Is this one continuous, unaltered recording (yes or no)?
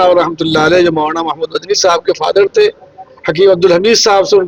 yes